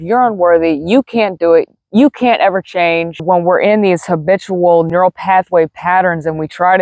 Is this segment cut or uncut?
cut